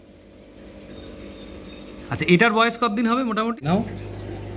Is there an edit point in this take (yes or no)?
yes